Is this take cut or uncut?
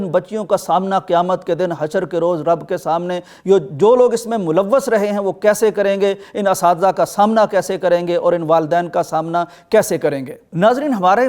uncut